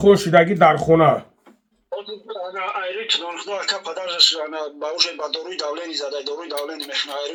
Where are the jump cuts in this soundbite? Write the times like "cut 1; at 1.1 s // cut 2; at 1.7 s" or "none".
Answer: none